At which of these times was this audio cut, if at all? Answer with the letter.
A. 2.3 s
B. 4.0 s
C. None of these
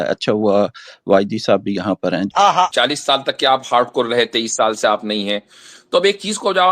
A